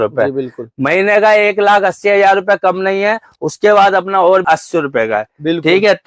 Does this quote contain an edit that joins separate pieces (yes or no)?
yes